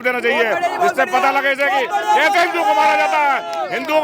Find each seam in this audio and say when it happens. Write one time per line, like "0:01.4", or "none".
none